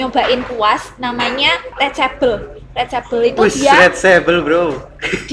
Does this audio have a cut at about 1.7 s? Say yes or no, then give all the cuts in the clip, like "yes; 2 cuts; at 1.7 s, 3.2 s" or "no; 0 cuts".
yes; 1 cut; at 1.7 s